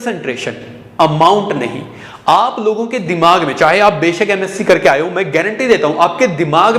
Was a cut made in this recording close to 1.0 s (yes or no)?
no